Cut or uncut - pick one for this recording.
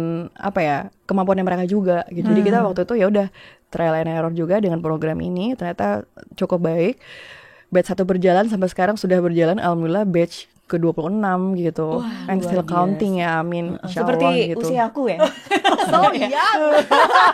cut